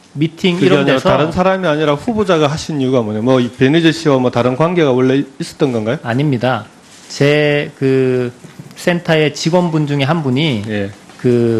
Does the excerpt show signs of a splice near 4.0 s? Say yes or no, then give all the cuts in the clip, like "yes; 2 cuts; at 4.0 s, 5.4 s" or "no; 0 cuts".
yes; 1 cut; at 4.0 s